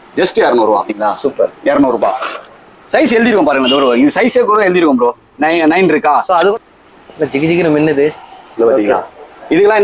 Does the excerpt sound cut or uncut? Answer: cut